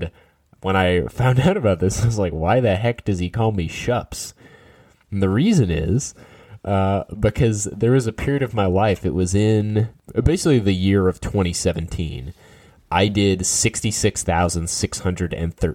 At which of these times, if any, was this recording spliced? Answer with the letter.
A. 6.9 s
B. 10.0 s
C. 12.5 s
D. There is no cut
B